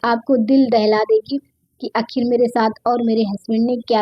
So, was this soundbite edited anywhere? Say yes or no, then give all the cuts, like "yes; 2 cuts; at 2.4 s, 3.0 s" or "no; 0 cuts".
no; 0 cuts